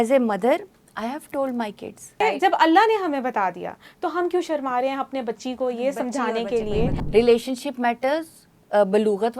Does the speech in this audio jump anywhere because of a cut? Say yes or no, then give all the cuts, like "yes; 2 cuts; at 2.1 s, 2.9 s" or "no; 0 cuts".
yes; 2 cuts; at 2.1 s, 7.0 s